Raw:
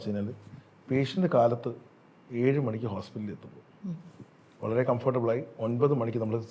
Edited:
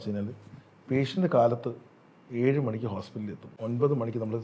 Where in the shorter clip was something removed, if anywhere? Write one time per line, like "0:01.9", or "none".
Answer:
0:03.5